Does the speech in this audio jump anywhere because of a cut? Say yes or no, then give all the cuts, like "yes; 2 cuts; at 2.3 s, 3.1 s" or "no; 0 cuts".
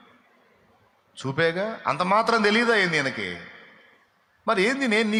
no; 0 cuts